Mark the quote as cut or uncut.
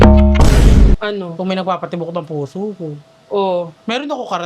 cut